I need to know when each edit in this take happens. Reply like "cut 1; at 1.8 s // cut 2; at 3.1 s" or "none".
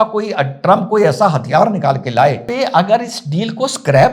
cut 1; at 2.5 s

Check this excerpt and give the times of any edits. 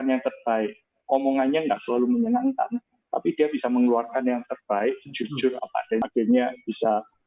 cut 1; at 6.0 s

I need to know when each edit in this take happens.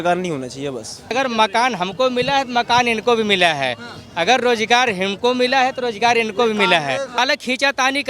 cut 1; at 1.1 s // cut 2; at 7.1 s

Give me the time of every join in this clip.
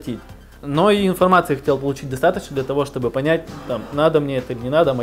none

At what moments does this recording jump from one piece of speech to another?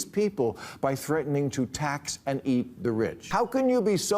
cut 1; at 3.2 s

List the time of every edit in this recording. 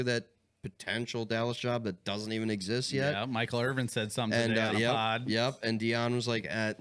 none

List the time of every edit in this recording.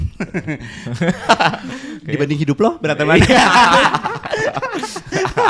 none

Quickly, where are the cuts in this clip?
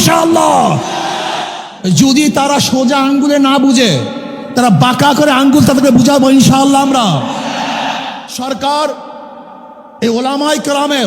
cut 1; at 1.6 s // cut 2; at 8.2 s

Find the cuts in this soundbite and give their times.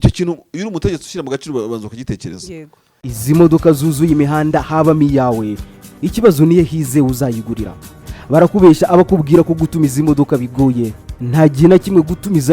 cut 1; at 3.1 s

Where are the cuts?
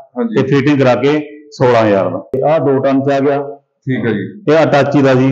cut 1; at 2.4 s

